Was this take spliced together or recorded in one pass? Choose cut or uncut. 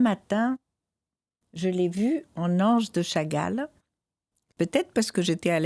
cut